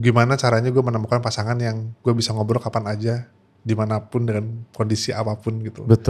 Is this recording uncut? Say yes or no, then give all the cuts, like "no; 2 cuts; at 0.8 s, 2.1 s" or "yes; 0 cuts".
yes; 0 cuts